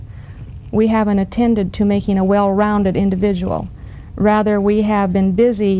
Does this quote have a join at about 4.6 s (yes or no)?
yes